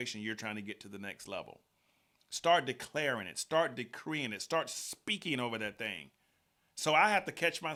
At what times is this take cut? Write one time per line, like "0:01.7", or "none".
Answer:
none